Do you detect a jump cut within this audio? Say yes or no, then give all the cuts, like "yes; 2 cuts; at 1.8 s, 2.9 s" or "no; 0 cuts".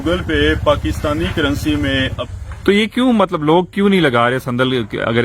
yes; 1 cut; at 2.2 s